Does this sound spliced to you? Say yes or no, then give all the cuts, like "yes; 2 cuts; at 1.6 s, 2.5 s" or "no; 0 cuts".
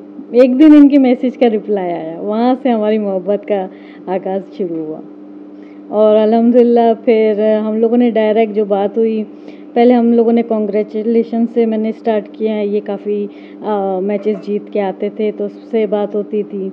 no; 0 cuts